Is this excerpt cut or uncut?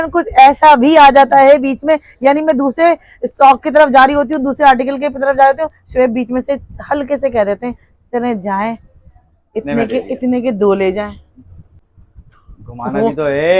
uncut